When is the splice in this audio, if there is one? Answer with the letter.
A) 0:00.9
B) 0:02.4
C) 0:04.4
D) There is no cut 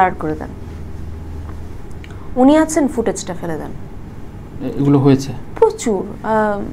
D